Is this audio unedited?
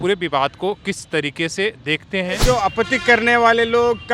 no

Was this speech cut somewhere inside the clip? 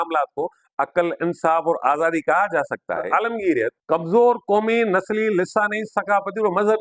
yes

